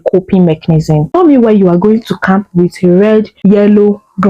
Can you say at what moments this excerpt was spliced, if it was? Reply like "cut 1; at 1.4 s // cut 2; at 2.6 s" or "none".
cut 1; at 1.1 s // cut 2; at 3.3 s